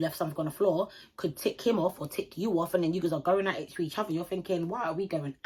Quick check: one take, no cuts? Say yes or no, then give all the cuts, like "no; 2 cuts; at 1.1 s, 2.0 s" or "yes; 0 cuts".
yes; 0 cuts